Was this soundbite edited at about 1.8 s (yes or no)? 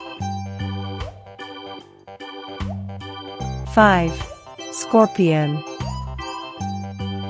no